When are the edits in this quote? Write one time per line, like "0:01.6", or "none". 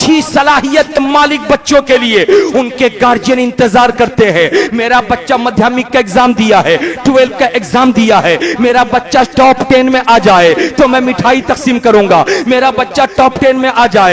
0:01.0